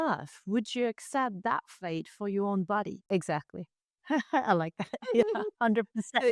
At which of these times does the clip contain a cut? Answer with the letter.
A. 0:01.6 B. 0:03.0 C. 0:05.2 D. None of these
B